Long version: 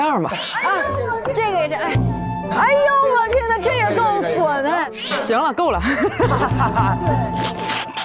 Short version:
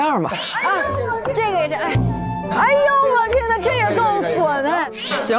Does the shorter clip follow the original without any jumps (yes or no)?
yes